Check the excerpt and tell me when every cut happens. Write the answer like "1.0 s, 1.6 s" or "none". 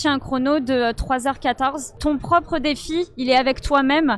2.0 s